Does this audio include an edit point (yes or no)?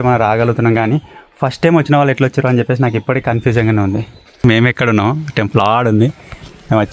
yes